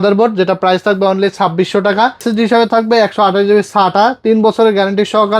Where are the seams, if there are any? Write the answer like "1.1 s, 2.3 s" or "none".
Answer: 2.2 s